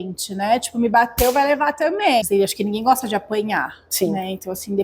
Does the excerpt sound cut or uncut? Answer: cut